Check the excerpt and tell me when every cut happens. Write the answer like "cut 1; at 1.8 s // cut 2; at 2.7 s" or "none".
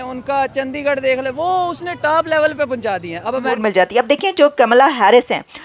cut 1; at 3.6 s